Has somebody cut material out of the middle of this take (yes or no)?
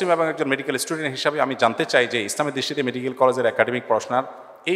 no